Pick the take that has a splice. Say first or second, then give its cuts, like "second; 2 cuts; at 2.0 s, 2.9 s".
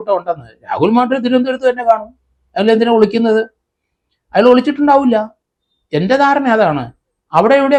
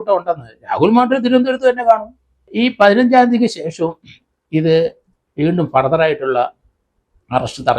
second; 1 cut; at 2.5 s